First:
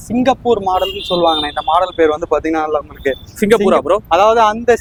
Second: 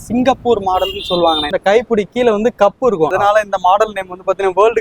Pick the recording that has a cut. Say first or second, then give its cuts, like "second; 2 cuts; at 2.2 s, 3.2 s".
second; 2 cuts; at 1.5 s, 3.1 s